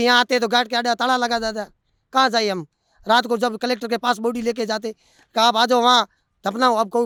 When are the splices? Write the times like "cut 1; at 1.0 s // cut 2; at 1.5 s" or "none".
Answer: none